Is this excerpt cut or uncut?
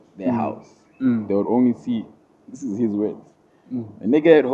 uncut